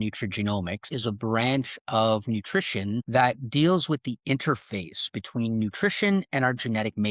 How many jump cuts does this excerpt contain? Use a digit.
2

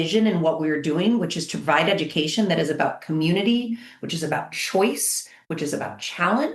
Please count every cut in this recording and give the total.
0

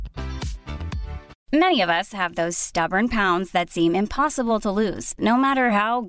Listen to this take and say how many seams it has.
1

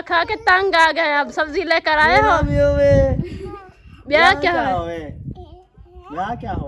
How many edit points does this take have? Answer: 0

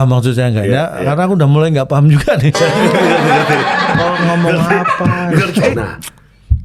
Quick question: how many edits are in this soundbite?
1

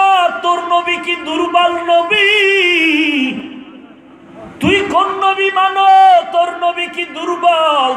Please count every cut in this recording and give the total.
0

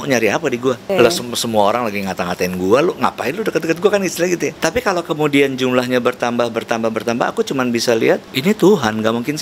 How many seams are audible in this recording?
3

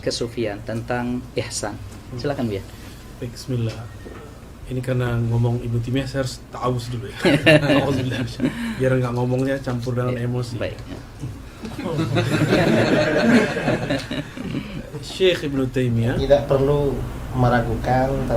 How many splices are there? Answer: 1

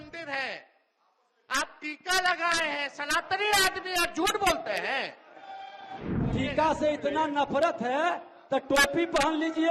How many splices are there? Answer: 1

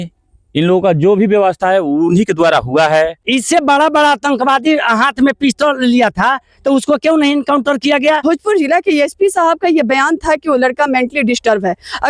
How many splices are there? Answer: 2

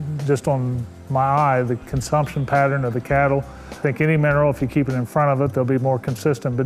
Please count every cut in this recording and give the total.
1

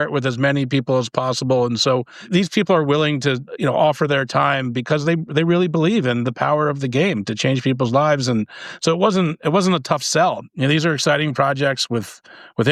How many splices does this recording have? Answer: 3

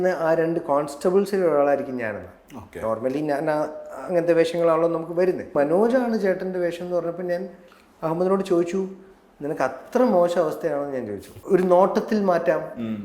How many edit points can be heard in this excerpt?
2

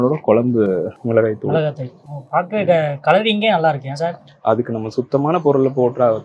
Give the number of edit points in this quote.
1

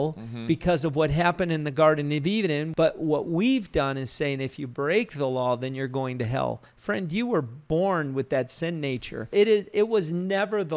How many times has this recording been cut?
3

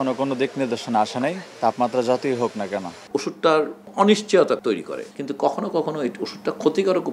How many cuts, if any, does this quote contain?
2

